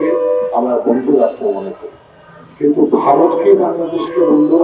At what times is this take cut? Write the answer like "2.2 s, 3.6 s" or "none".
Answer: none